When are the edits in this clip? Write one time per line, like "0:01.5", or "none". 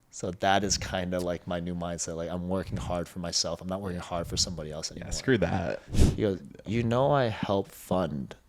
0:05.8